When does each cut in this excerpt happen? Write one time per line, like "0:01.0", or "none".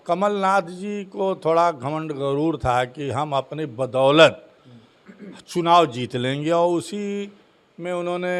none